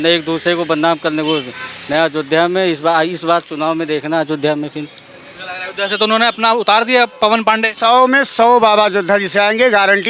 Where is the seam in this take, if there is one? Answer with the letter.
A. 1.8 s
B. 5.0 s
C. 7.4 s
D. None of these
D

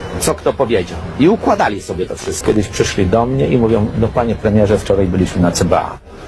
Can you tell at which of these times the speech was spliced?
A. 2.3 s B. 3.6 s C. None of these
A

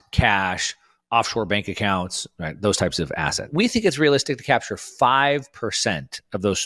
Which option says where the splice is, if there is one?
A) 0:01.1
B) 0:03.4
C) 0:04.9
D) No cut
B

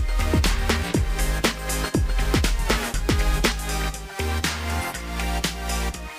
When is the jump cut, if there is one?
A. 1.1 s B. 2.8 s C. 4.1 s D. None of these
B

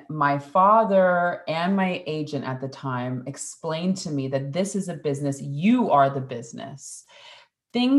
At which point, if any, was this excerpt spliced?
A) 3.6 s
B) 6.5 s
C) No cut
C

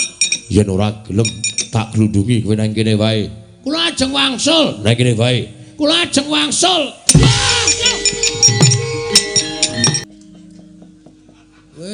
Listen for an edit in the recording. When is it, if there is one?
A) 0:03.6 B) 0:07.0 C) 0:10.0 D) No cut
C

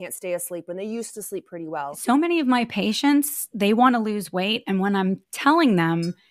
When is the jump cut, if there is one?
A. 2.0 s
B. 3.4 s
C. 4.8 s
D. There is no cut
A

